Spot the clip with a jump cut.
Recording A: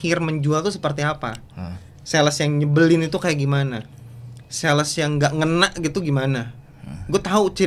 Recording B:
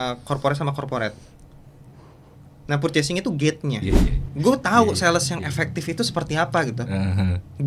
B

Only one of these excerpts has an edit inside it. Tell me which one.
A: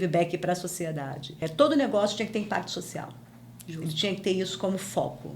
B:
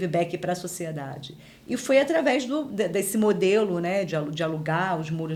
A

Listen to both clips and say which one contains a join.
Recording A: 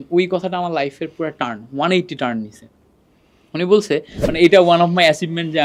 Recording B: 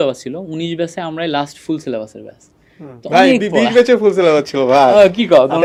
A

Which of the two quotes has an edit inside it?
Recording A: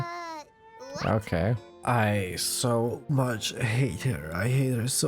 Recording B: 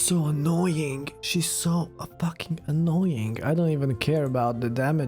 A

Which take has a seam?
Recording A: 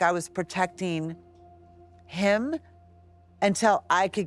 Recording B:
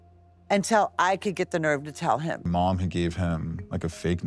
B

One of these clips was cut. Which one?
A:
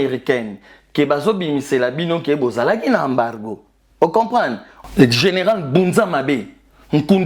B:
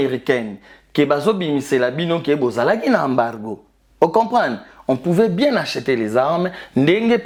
A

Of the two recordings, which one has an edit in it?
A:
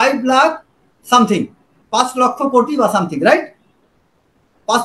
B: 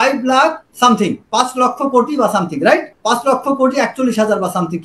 B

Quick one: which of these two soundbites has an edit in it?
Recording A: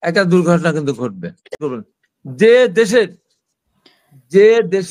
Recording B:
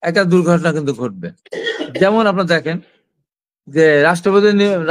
A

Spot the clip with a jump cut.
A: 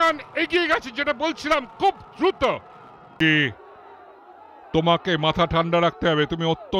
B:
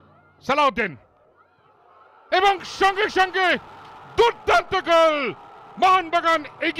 A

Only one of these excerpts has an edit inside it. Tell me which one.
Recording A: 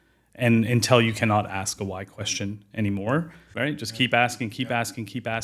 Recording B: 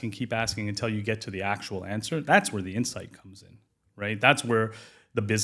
A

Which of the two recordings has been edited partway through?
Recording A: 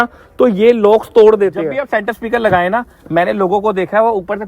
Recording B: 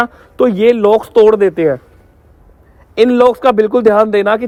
A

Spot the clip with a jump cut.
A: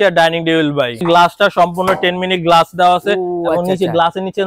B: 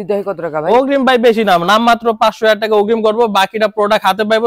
A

